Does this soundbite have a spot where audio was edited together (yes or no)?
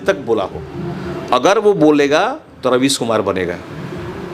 no